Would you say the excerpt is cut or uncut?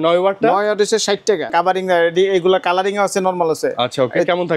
cut